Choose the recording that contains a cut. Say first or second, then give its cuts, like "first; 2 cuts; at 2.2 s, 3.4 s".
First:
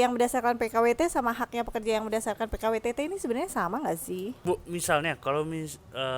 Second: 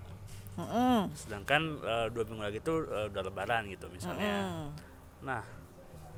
first; 1 cut; at 4.4 s